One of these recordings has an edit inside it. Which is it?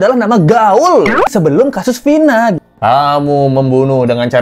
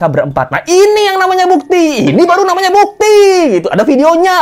first; 2 cuts; at 1.3 s, 2.6 s

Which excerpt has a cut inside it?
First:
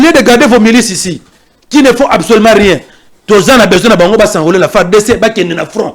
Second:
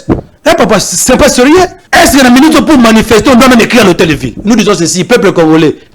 second; 2 cuts; at 1.8 s, 4.3 s

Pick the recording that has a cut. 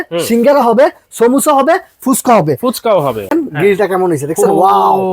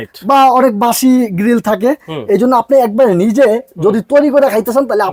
first; 1 cut; at 3.3 s

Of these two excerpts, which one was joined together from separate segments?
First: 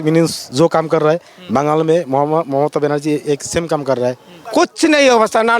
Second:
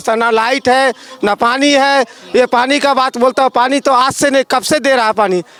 first; 1 cut; at 4.3 s

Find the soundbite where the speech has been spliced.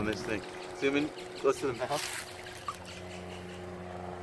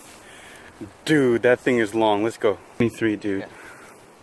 second; 1 cut; at 2.8 s

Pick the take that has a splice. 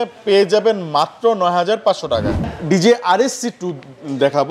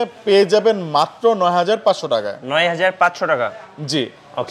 first; 1 cut; at 2.4 s

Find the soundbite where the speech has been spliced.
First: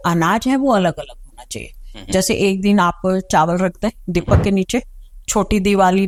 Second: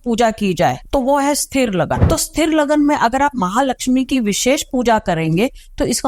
second; 2 cuts; at 0.8 s, 2.0 s

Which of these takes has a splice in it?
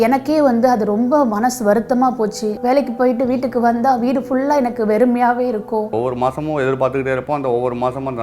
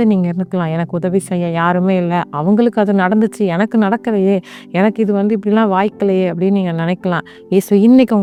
first; 2 cuts; at 2.6 s, 5.9 s

